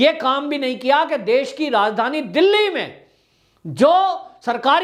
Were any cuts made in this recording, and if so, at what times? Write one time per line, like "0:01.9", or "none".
none